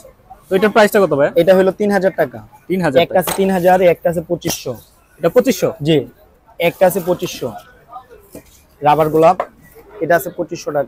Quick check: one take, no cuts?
yes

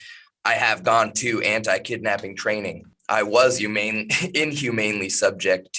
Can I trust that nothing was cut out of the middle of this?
no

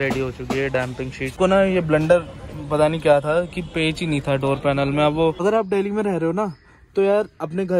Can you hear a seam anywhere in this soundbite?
yes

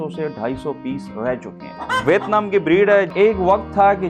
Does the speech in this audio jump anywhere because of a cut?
yes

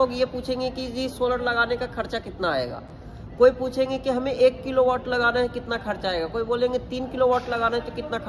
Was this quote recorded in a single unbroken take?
yes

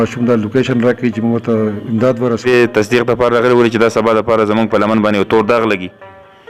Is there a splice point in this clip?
yes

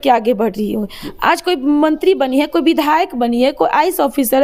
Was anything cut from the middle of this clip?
no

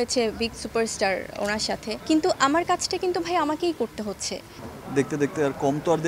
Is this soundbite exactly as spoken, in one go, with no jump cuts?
no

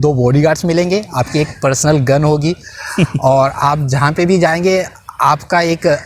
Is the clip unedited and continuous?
yes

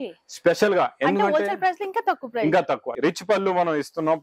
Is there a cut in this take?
yes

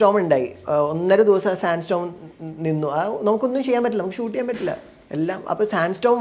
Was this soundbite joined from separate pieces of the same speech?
no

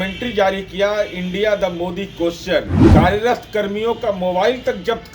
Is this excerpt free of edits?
no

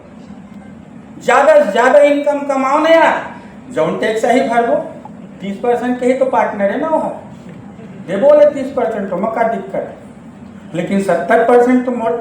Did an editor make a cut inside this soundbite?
no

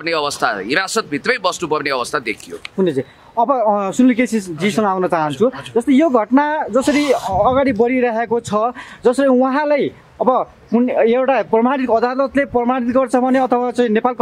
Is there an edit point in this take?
no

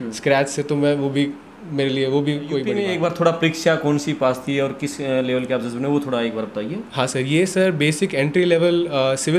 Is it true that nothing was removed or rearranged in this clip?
no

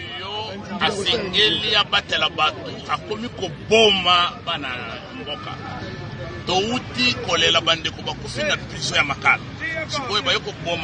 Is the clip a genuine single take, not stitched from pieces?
yes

